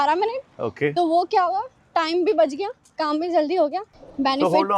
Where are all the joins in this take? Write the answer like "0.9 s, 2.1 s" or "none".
3.8 s

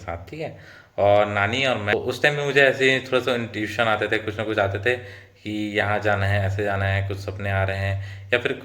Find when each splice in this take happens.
1.9 s

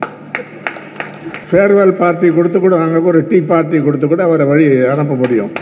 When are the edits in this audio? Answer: 1.4 s

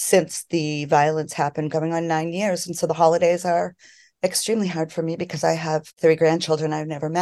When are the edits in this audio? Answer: 6.0 s

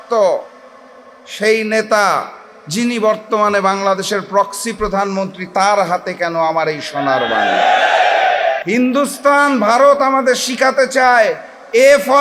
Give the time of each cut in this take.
8.6 s

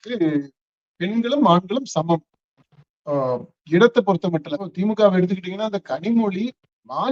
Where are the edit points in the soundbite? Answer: 4.7 s

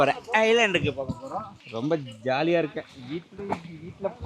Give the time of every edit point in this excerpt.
1.6 s

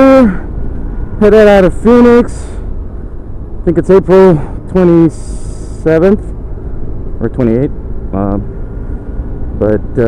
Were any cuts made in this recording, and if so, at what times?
7.0 s

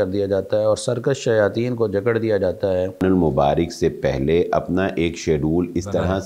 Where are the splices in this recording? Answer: 3.0 s

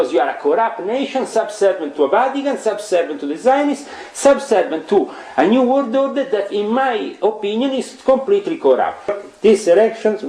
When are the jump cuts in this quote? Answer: 9.1 s

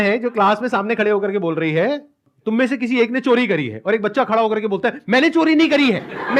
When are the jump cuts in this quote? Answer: none

